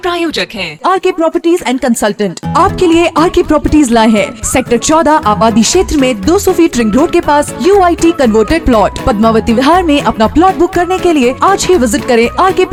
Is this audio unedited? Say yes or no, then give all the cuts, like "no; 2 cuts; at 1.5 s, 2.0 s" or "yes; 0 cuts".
yes; 0 cuts